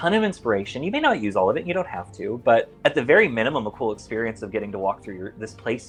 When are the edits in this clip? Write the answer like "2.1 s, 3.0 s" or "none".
none